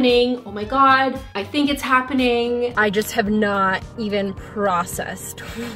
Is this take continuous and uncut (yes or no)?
no